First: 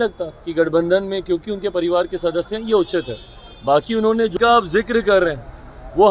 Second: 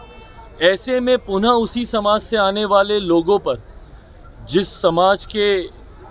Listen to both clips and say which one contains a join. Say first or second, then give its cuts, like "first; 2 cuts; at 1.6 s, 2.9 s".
first; 1 cut; at 4.3 s